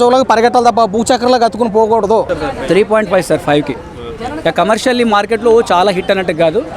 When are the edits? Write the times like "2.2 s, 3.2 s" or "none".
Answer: 2.3 s